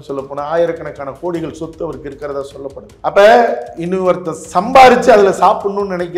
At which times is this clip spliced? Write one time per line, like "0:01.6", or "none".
0:02.9